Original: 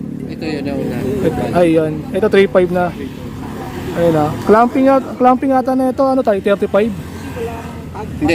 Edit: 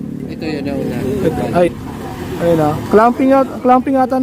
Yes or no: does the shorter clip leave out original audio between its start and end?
yes